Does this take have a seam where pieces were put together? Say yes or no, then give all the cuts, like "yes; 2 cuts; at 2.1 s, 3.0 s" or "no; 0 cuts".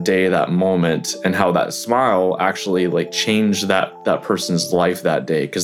no; 0 cuts